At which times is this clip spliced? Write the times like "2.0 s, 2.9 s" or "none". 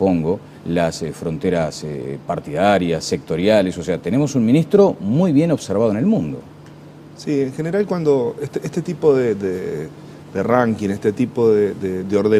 none